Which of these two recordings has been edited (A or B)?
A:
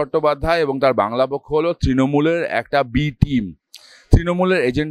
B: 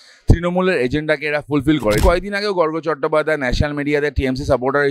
B